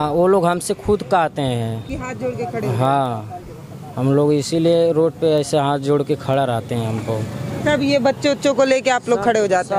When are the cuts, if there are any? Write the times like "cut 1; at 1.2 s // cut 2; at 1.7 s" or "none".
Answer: none